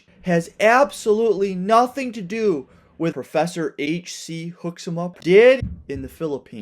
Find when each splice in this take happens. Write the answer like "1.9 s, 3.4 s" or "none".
3.9 s, 5.2 s, 5.7 s